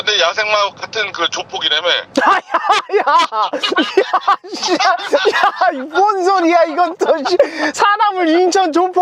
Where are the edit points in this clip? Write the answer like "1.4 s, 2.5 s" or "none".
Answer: none